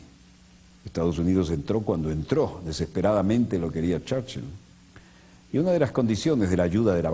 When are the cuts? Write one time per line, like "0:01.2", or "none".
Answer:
0:05.9